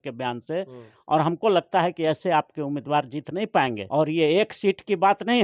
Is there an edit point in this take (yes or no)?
yes